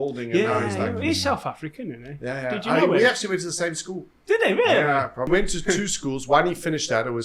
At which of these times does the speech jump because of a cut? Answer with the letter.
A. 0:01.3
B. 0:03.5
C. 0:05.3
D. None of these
C